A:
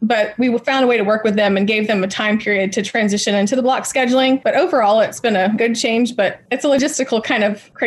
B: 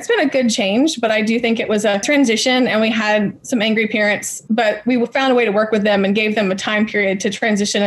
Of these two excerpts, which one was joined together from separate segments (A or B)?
A